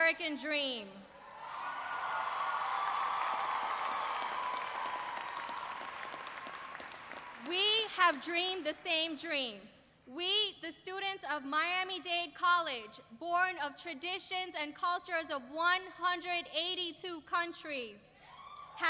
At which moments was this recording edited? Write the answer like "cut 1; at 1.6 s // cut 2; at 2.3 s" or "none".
cut 1; at 2.4 s